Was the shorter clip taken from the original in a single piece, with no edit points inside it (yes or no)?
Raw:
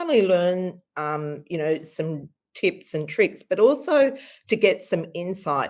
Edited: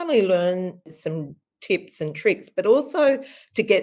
no